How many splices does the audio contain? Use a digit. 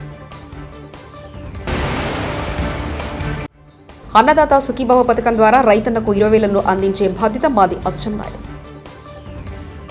0